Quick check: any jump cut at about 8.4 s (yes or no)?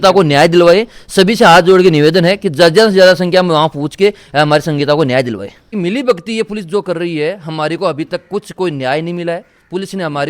no